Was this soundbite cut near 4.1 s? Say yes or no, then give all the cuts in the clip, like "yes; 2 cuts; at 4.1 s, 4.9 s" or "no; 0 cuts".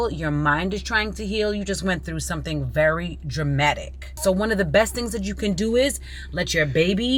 yes; 1 cut; at 4.1 s